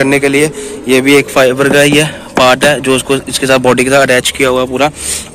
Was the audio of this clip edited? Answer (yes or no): no